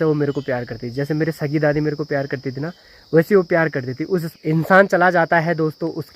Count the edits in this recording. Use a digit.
1